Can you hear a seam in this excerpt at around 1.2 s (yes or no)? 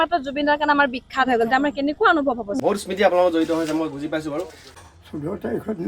no